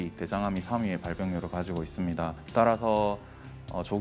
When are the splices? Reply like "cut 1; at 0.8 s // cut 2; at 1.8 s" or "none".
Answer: cut 1; at 2.4 s